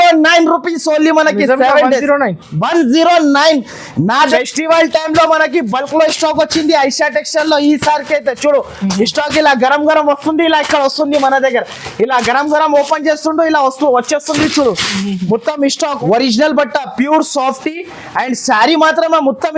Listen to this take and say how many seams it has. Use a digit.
2